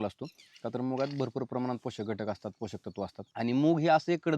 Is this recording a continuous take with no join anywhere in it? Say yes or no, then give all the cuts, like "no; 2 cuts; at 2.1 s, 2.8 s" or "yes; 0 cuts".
no; 1 cut; at 3.2 s